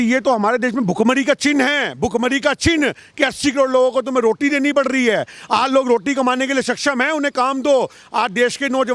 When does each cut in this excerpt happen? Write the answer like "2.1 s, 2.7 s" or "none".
none